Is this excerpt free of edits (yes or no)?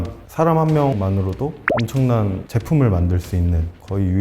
no